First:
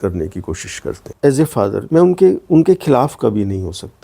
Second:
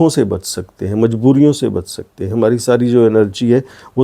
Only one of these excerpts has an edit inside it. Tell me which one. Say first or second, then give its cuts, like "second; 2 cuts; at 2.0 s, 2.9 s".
first; 1 cut; at 1.0 s